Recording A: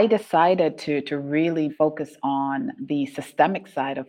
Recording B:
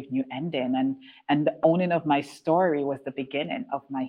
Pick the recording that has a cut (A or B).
A